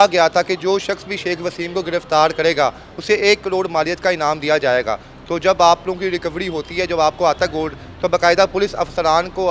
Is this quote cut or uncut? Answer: uncut